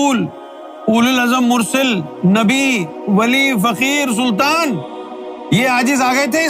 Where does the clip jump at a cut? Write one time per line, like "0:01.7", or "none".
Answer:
none